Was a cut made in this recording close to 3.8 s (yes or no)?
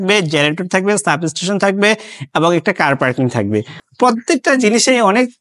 yes